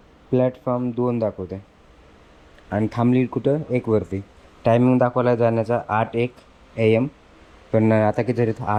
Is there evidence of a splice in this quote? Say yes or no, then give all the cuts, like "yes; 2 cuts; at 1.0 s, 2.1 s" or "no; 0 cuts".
no; 0 cuts